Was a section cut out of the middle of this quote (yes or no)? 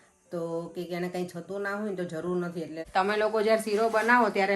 yes